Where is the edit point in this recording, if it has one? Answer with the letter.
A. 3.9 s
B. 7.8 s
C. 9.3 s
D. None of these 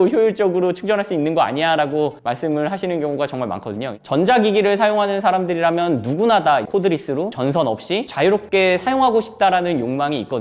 A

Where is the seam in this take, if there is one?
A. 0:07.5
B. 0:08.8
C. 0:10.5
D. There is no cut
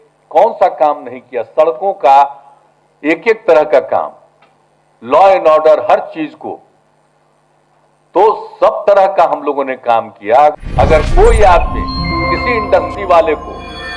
C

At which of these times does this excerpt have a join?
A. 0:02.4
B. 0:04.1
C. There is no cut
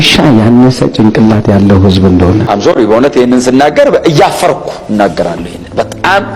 A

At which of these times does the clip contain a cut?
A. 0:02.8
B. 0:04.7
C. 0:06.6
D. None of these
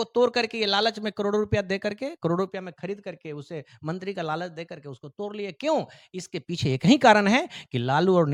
D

